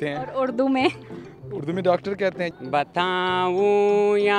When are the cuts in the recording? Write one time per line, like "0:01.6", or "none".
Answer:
0:02.5